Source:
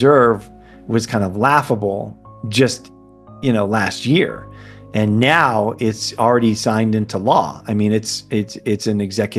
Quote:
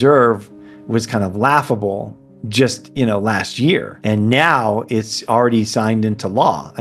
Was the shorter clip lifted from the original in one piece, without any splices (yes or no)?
no